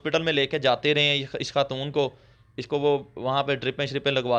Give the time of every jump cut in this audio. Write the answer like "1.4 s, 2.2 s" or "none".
none